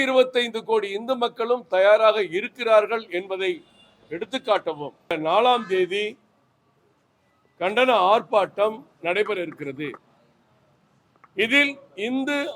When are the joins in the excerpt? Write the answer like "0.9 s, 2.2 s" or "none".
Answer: 5.1 s